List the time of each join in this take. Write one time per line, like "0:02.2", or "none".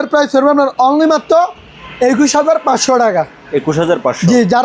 none